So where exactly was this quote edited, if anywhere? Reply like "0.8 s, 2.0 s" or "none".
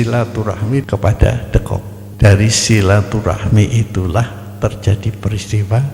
0.9 s, 2.0 s